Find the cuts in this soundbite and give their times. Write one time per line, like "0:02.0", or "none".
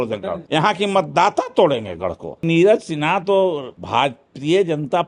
0:02.4
0:03.7